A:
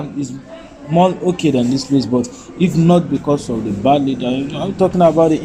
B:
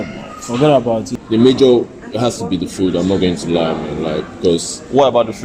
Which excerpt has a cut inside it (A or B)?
B